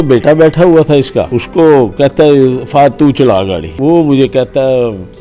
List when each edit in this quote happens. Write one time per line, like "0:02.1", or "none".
0:01.4
0:03.7